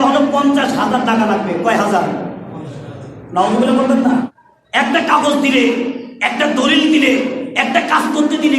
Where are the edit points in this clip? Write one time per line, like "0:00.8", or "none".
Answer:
0:04.3